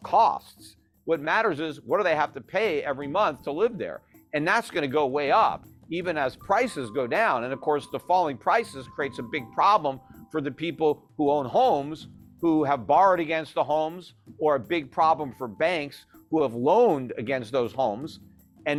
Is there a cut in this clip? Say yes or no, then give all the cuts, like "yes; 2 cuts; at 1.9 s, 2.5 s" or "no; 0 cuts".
no; 0 cuts